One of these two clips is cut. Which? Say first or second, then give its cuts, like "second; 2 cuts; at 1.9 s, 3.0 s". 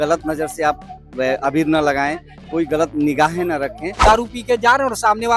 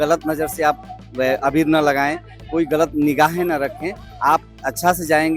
first; 1 cut; at 4.0 s